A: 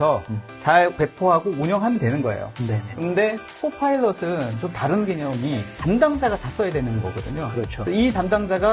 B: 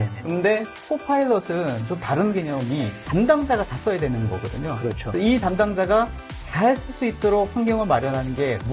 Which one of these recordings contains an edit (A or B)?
A